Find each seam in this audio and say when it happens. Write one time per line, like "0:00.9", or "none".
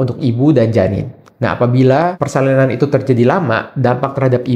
none